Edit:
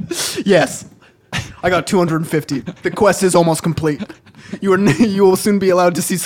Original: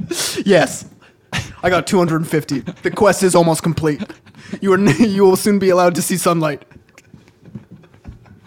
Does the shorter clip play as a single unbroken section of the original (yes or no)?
yes